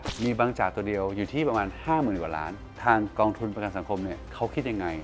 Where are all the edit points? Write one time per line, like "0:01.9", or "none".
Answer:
0:02.7